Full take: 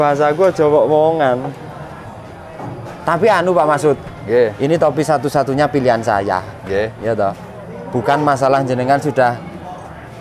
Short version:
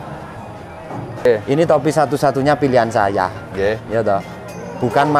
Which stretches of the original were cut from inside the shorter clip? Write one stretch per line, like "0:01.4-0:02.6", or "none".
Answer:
0:02.9-0:04.4